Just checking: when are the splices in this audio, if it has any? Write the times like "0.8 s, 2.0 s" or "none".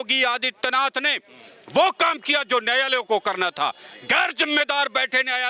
none